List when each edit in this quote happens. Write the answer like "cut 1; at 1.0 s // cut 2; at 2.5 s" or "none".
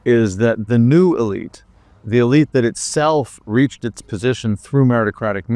none